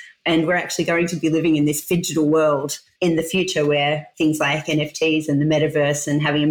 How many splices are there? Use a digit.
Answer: 2